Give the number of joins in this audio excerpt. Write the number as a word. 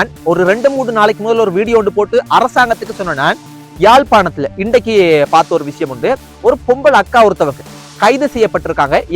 one